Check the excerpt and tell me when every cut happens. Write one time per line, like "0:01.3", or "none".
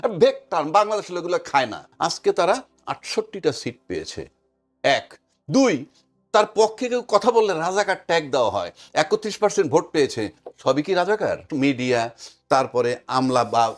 0:01.9
0:11.5